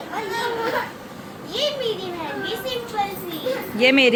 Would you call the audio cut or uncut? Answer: uncut